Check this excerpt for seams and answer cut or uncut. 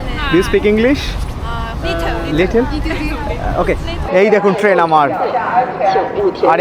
cut